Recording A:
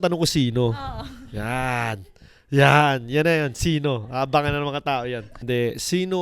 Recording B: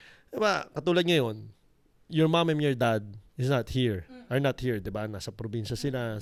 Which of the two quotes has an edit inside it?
A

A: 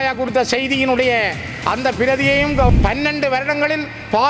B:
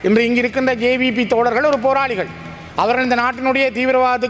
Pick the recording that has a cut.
A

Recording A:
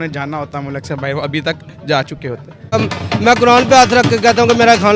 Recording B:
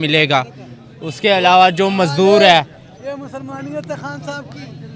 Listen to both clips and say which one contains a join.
A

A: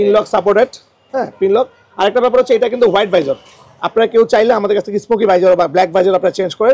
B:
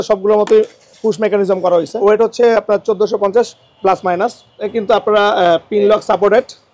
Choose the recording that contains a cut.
B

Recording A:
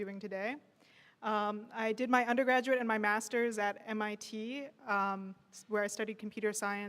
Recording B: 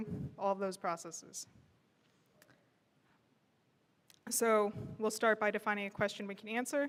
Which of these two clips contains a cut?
A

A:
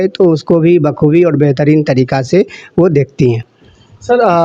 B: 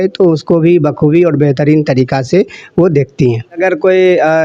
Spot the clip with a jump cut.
B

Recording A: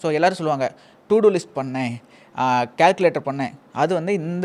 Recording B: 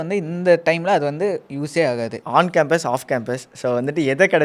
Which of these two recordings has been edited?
B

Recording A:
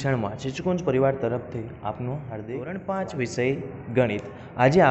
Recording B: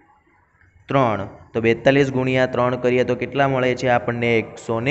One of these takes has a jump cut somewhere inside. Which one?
A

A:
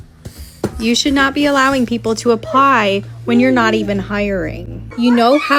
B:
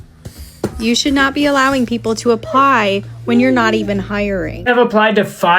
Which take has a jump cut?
B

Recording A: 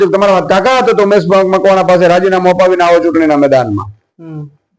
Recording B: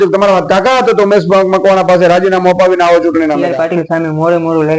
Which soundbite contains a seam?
B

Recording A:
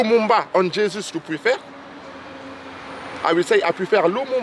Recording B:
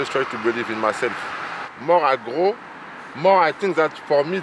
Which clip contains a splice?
B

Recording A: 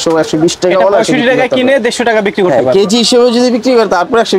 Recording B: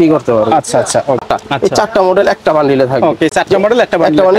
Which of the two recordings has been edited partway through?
B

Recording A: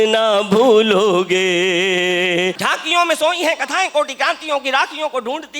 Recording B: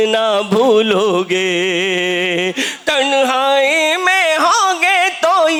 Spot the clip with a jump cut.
A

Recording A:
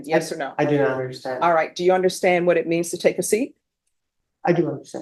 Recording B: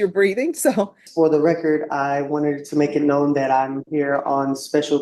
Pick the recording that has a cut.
B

